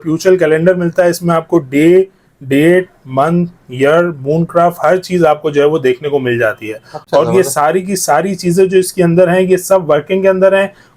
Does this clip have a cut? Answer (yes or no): no